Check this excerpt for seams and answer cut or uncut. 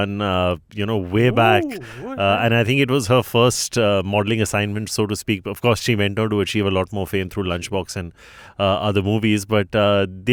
uncut